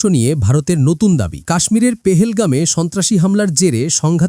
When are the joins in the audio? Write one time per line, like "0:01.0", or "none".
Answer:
none